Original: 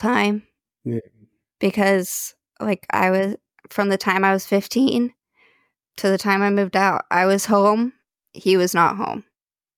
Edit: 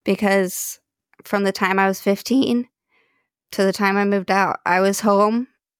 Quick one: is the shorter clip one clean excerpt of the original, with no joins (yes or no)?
no